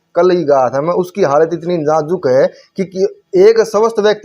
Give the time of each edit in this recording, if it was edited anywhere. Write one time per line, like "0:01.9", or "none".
none